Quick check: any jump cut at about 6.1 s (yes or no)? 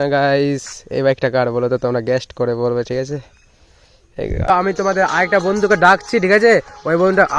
no